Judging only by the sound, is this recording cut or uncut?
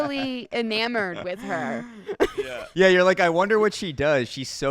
cut